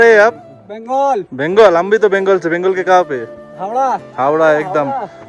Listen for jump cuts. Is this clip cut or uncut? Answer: uncut